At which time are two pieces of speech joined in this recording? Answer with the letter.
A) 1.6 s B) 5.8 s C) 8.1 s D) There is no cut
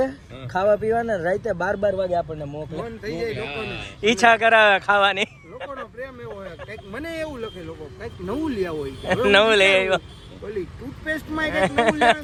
D